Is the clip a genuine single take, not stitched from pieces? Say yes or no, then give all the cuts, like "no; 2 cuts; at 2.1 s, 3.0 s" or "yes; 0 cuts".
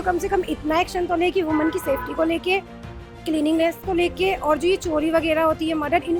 yes; 0 cuts